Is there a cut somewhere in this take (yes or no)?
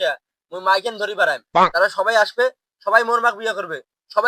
no